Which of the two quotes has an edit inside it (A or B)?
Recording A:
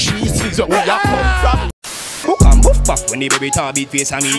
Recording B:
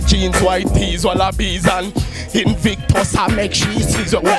A